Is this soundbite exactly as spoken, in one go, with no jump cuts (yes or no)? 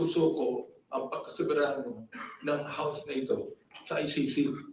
no